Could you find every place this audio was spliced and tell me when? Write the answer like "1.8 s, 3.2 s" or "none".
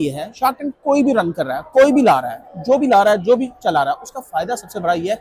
none